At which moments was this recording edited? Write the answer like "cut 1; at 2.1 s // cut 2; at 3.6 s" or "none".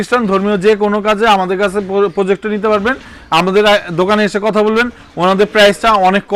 none